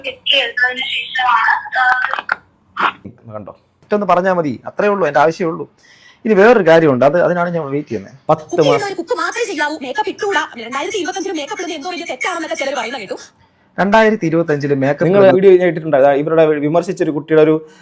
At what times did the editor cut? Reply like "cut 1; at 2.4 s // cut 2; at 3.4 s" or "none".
cut 1; at 3.0 s // cut 2; at 15.3 s